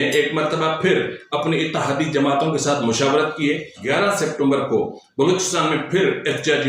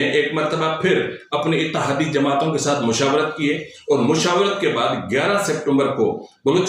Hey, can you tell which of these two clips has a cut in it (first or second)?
first